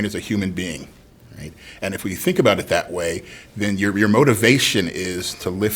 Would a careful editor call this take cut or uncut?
uncut